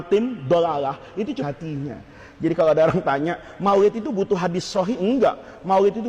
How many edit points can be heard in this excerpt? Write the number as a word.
one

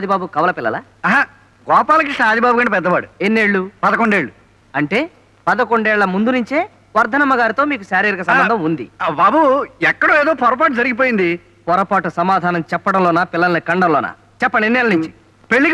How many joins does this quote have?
zero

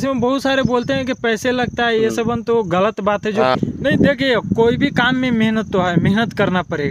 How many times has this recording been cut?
one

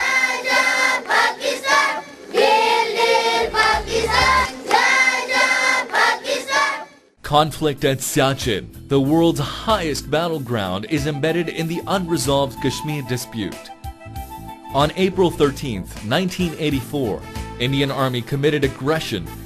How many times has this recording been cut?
one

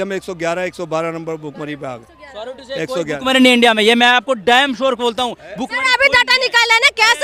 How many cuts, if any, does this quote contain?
zero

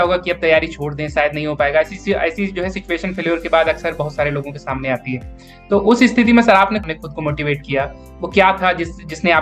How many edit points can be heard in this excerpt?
one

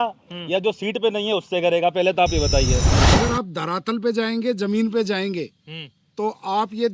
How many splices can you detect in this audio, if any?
one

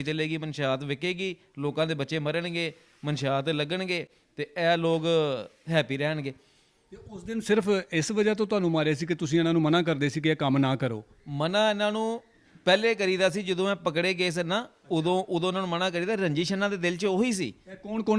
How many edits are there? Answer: zero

